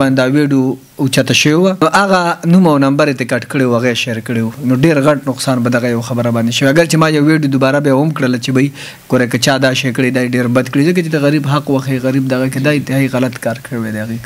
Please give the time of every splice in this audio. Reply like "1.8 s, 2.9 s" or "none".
1.8 s